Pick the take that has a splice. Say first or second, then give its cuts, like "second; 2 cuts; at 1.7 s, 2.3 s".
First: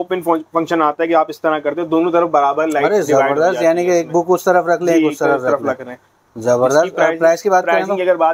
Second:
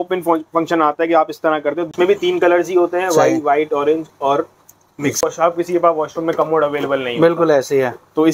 second; 2 cuts; at 1.9 s, 5.2 s